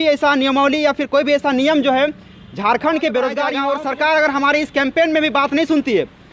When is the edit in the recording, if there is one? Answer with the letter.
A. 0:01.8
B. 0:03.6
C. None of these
B